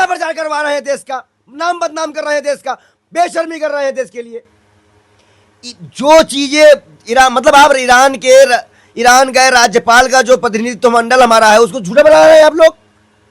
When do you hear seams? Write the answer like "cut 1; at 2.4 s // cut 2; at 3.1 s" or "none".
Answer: none